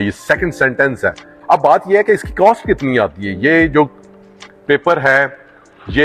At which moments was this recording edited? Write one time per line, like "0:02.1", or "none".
0:01.3